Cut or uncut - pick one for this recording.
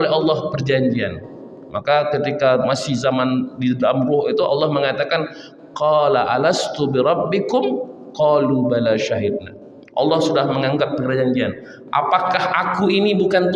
uncut